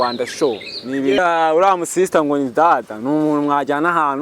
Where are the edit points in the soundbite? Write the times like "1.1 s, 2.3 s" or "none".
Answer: 1.2 s

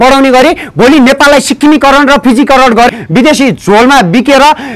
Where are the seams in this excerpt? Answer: 2.9 s

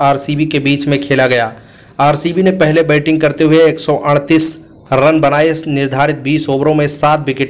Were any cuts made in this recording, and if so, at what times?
none

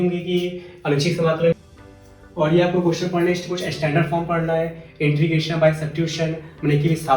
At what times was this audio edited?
1.6 s

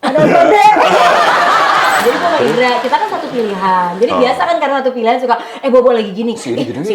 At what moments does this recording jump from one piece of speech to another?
2.0 s

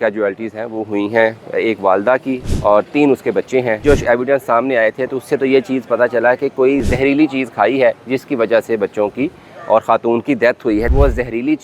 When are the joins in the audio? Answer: 2.5 s, 3.8 s, 6.8 s, 10.9 s

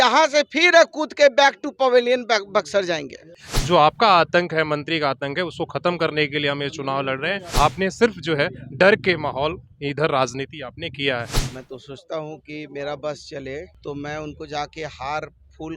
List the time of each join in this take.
3.5 s, 7.4 s, 11.4 s, 13.7 s

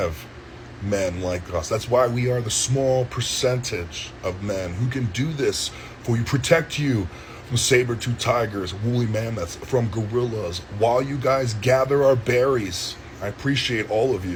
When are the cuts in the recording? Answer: none

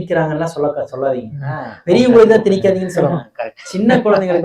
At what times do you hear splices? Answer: none

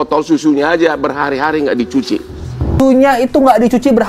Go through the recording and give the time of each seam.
2.8 s

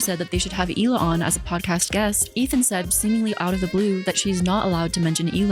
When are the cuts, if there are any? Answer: none

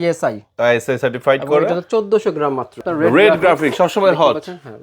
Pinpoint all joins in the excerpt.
2.8 s

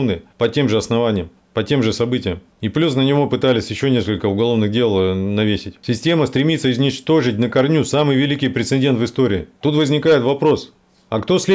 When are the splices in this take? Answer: none

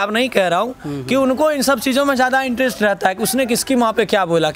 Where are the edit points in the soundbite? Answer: none

